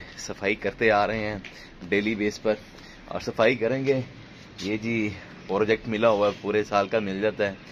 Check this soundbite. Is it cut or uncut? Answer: uncut